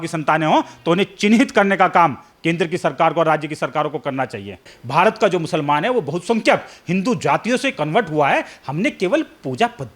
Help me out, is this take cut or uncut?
cut